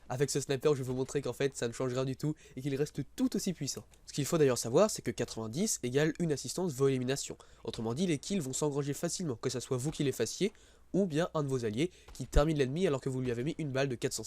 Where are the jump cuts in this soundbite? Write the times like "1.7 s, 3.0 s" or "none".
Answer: 12.7 s